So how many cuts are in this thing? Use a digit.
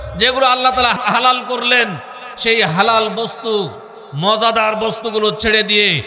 0